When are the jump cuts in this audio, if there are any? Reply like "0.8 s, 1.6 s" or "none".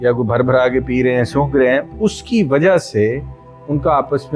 none